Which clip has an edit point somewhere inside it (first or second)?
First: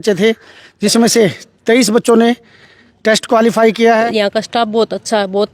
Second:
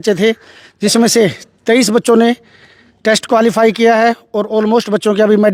first